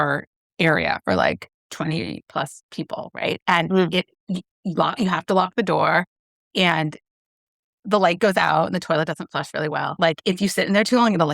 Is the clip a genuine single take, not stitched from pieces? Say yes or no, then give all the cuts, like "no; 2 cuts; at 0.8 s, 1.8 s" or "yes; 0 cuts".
no; 1 cut; at 10.0 s